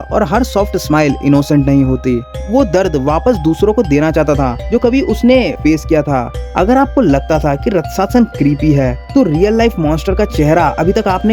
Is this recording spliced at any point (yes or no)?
yes